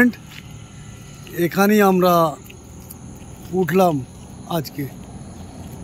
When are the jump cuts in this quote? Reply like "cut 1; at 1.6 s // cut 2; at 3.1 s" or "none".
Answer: none